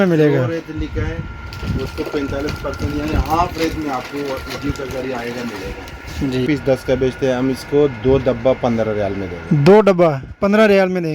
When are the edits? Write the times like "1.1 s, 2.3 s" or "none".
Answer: 6.4 s